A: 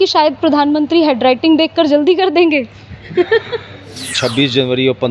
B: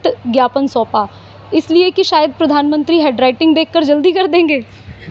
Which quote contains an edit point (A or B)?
A